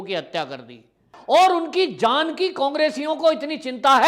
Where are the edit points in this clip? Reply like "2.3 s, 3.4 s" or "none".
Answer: 1.1 s